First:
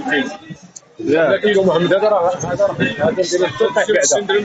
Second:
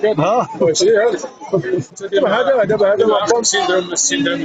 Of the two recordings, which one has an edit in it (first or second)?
second